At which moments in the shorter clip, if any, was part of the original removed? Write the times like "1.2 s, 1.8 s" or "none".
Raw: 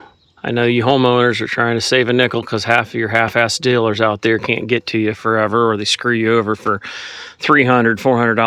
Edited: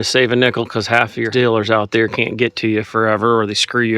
1.3 s